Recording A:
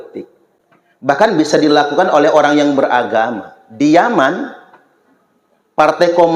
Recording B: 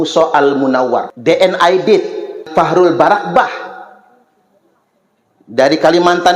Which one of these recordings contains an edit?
B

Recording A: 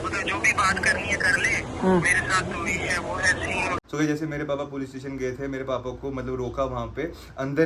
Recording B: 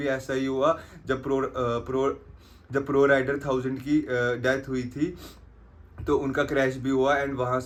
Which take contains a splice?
A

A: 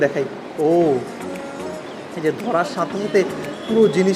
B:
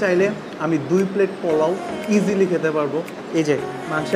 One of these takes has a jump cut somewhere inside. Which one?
B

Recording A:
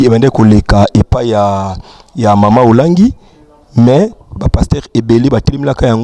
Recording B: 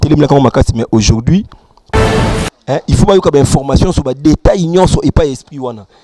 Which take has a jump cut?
B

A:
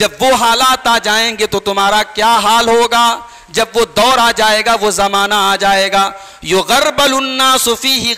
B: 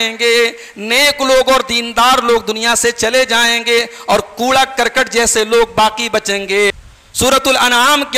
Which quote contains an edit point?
B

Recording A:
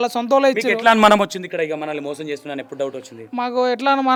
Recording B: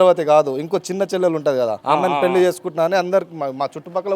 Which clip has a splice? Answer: B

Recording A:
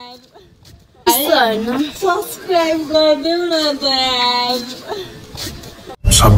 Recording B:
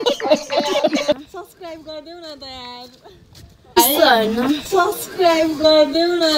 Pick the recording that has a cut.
B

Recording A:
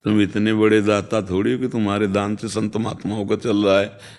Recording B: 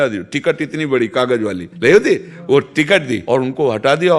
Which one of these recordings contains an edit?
B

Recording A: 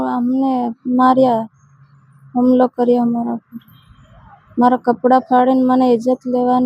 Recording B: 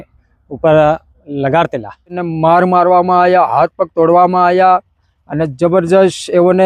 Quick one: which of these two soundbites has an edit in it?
B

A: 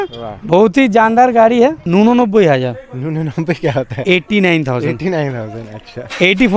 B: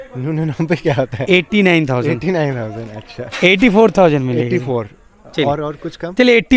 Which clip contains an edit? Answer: A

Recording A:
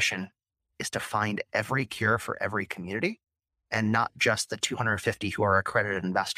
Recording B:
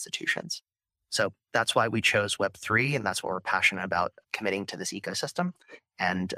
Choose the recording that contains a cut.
B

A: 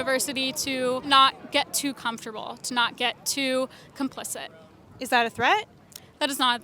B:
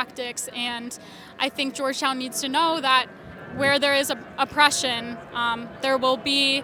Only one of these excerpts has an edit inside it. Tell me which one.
A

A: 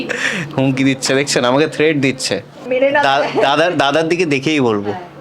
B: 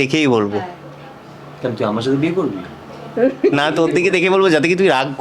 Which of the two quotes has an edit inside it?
A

